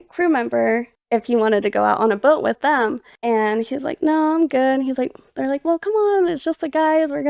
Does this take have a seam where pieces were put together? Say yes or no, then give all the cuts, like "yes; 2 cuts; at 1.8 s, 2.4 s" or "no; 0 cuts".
yes; 2 cuts; at 0.9 s, 2.6 s